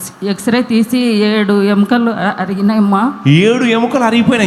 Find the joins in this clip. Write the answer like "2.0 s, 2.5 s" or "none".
none